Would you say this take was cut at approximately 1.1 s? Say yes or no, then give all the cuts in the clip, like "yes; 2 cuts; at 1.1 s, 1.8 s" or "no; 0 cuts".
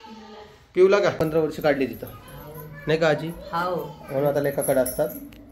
yes; 1 cut; at 1.1 s